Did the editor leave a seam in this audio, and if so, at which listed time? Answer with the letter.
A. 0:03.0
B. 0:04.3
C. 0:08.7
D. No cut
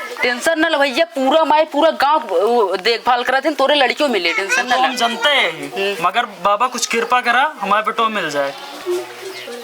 C